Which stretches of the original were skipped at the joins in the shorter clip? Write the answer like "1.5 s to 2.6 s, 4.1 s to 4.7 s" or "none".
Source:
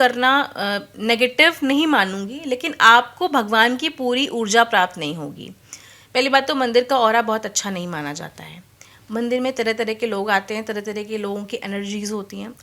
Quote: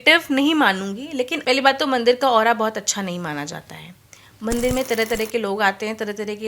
2.7 s to 6.0 s